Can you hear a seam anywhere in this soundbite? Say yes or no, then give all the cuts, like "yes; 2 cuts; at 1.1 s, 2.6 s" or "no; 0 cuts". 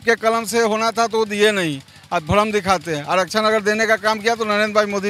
no; 0 cuts